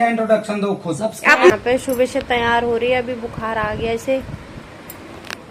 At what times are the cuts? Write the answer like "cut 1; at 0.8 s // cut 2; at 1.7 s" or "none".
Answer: cut 1; at 1.5 s